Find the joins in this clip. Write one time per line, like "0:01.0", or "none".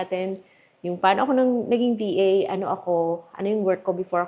none